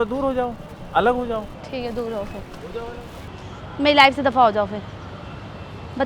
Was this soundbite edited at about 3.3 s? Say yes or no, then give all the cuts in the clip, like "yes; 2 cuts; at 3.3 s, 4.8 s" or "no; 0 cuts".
yes; 1 cut; at 3.3 s